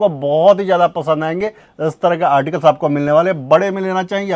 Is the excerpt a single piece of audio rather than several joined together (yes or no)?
yes